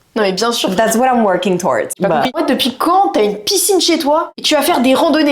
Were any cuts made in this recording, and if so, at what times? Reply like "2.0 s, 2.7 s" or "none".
2.0 s, 4.3 s